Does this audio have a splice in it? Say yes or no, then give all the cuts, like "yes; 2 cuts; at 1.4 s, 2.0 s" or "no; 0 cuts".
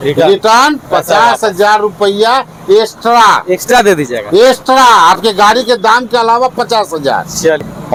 no; 0 cuts